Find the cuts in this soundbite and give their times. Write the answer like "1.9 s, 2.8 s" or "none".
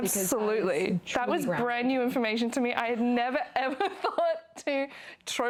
none